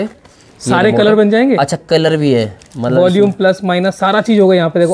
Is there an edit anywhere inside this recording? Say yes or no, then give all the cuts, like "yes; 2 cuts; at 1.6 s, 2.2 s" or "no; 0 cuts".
no; 0 cuts